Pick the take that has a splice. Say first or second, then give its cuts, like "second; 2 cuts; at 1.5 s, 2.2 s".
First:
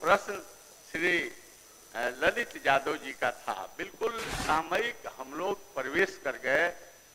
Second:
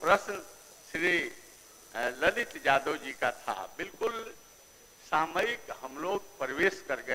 first; 1 cut; at 4.3 s